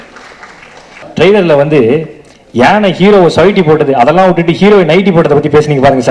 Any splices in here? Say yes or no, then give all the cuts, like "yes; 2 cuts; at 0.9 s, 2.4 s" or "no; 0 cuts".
yes; 1 cut; at 1.0 s